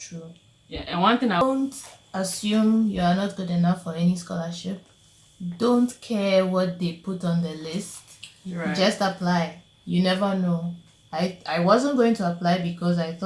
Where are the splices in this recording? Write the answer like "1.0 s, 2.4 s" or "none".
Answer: 1.4 s